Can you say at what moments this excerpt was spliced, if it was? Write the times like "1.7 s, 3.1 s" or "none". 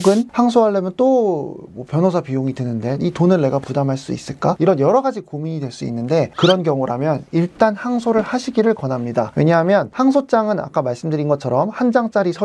none